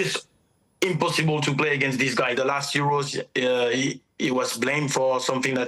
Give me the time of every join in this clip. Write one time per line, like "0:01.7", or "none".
0:02.3